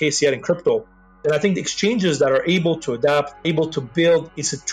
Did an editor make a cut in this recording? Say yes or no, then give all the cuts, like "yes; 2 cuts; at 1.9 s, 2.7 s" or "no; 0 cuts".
yes; 2 cuts; at 1.1 s, 3.4 s